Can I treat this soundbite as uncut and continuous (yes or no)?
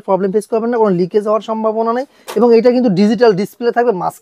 yes